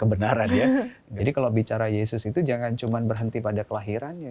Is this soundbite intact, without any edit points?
no; 1 cut; at 1.0 s

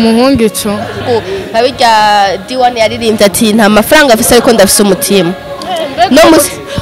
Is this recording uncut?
no; 1 cut; at 1.0 s

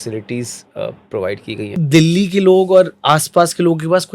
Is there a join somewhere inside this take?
yes; 1 cut; at 1.8 s

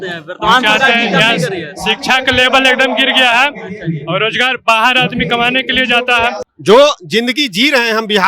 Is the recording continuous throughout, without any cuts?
no; 1 cut; at 6.4 s

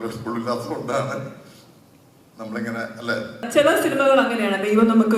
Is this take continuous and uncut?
no; 1 cut; at 3.5 s

